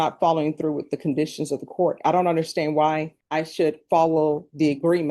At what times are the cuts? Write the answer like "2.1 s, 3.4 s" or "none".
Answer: 3.1 s

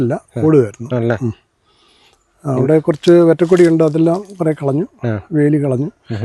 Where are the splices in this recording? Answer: none

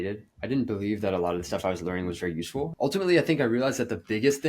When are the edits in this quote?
2.7 s

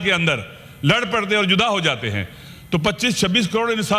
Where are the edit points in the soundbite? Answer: none

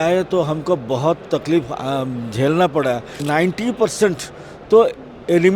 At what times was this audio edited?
3.1 s

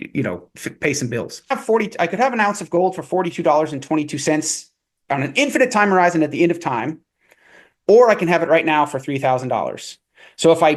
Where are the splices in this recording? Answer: 1.6 s

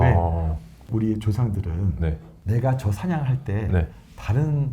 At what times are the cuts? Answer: 0.8 s, 2.3 s

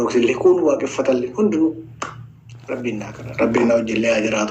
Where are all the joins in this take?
3.2 s

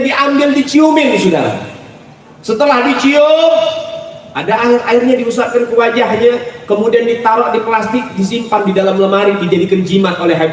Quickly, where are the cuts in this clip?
none

